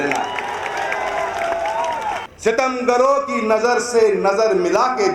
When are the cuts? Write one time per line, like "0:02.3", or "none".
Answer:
0:02.3